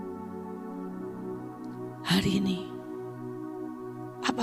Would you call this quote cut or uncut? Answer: uncut